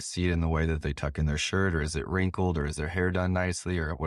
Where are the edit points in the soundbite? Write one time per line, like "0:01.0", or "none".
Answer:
none